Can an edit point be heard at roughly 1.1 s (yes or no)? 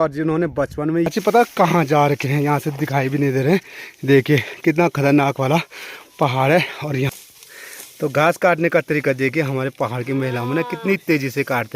yes